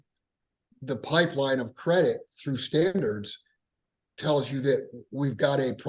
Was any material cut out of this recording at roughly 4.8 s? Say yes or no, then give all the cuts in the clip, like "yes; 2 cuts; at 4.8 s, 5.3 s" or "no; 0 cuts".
no; 1 cut; at 2.9 s